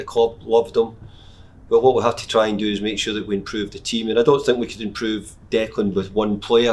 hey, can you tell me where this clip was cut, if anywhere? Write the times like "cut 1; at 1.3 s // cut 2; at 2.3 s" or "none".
none